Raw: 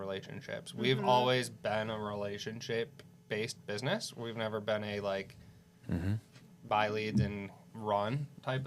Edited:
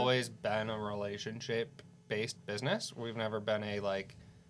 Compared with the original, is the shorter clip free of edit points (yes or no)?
yes